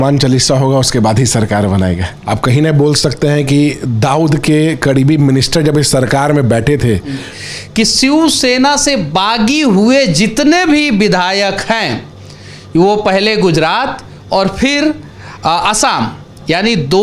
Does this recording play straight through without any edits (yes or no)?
no